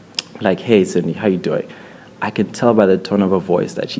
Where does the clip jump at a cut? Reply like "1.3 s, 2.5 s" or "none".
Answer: none